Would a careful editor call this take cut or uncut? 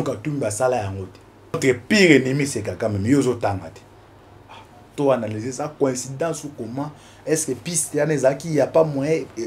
cut